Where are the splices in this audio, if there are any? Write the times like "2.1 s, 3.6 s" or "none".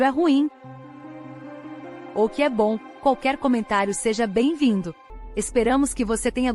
5.0 s